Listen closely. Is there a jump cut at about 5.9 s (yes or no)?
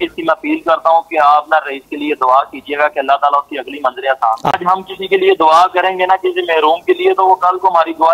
no